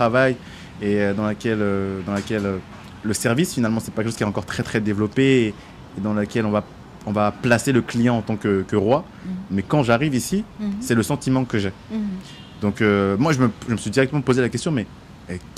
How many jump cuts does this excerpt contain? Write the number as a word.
zero